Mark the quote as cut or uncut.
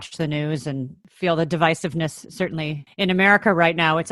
cut